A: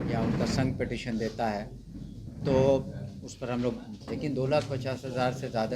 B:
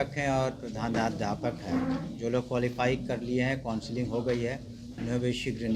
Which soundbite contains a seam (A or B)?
A